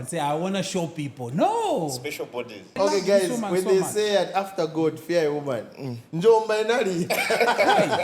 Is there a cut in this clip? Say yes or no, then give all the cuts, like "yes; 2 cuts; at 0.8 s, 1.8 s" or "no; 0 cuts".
yes; 1 cut; at 2.8 s